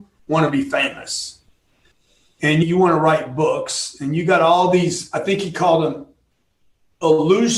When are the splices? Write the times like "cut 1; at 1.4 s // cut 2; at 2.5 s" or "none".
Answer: none